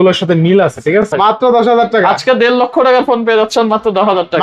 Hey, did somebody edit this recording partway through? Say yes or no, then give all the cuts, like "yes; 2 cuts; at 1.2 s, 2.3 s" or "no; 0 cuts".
yes; 1 cut; at 1.1 s